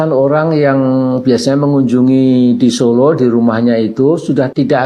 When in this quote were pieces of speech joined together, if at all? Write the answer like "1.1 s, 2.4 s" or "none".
none